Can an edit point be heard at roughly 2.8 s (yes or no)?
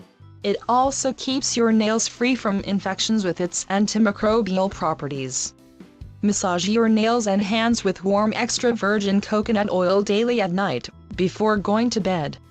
yes